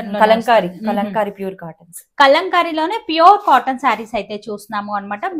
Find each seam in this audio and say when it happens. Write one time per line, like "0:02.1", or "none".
none